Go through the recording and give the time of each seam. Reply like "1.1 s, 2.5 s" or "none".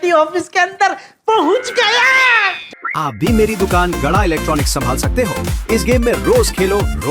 2.6 s